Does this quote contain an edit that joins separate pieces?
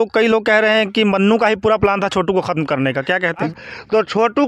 yes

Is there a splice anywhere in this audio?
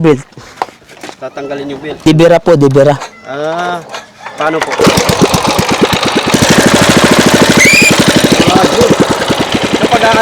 yes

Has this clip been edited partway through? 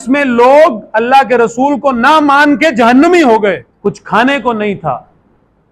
yes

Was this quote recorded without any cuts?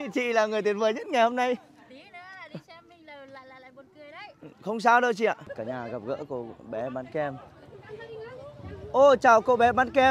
no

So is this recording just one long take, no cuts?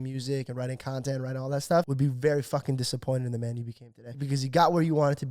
no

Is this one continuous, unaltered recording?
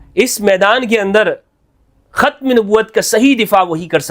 yes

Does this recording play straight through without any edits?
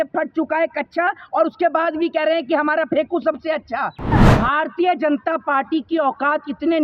no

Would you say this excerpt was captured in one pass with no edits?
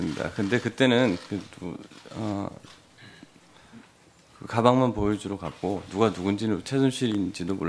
no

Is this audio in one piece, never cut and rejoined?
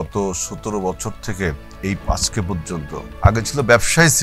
no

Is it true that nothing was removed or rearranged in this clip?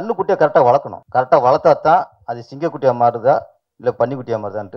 no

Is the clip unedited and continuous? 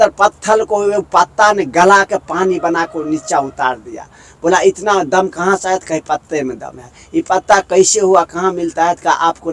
yes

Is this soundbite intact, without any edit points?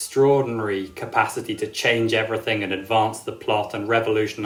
yes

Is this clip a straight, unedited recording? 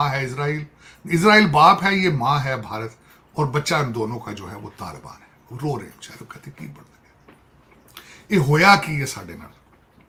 yes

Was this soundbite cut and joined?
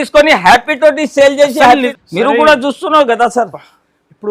yes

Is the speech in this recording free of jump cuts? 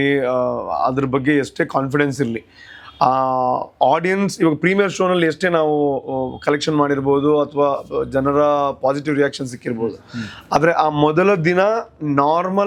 yes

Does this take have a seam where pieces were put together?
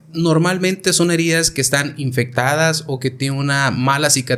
no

